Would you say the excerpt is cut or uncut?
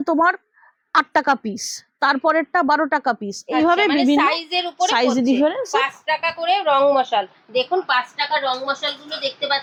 uncut